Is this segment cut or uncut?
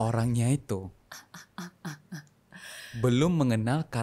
uncut